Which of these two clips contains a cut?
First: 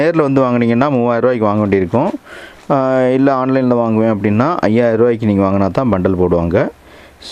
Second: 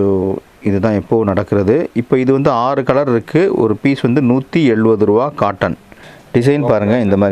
second; 1 cut; at 5.9 s

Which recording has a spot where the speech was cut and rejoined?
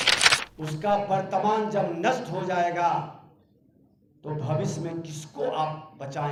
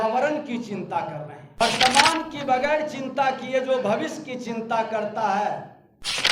second; 1 cut; at 1.6 s

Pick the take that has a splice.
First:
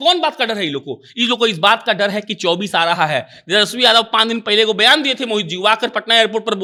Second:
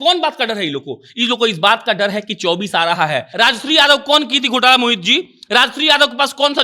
second; 1 cut; at 3.3 s

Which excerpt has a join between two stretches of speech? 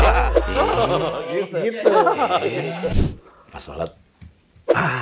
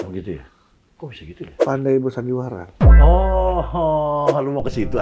first; 1 cut; at 2.9 s

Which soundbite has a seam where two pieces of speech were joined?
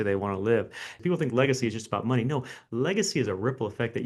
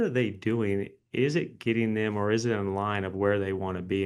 first; 1 cut; at 0.9 s

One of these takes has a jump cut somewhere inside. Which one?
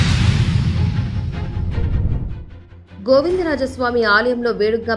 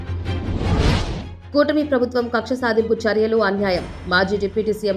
second; 1 cut; at 1.3 s

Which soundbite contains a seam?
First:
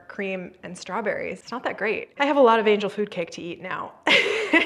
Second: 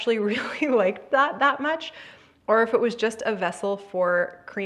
first; 1 cut; at 1.5 s

